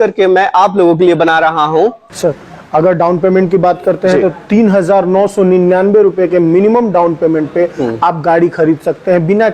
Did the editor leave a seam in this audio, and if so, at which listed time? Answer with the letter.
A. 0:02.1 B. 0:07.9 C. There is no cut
A